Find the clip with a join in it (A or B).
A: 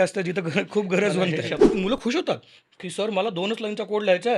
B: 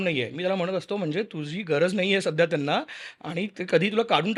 A